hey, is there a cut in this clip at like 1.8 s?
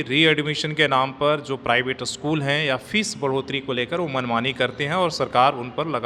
no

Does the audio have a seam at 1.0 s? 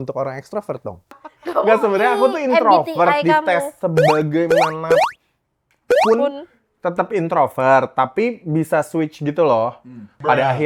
yes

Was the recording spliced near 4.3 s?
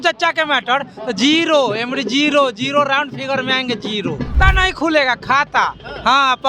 yes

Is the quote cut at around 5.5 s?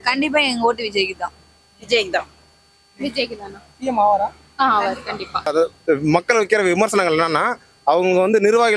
yes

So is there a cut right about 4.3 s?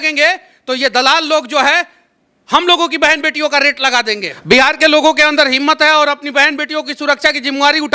yes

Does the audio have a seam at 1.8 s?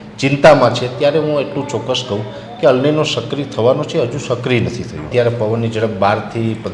no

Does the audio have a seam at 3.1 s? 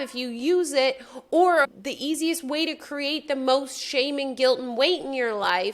no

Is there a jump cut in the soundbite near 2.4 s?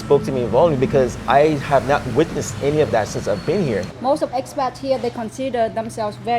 no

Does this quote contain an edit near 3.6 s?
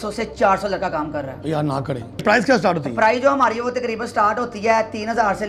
no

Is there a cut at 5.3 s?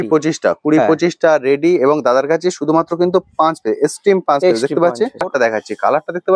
yes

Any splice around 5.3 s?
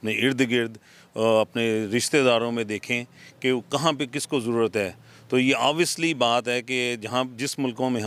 no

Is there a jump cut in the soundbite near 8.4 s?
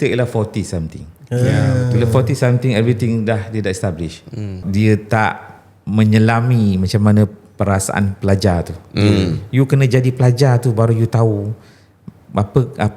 no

